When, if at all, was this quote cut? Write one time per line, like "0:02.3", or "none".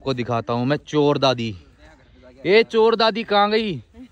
none

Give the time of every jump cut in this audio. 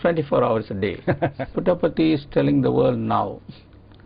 0:01.4

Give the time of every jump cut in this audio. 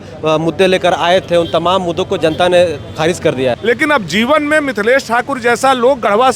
0:03.6

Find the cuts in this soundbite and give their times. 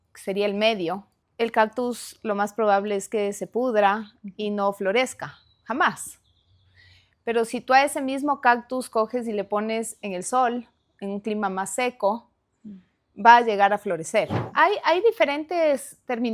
0:14.4

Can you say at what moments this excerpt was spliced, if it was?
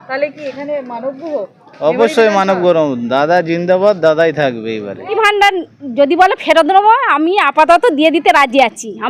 0:05.1

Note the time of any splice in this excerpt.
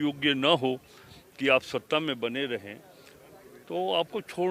none

